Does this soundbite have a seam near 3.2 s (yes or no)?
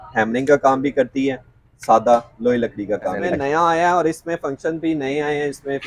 yes